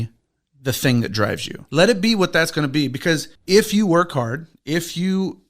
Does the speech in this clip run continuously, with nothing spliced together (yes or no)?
no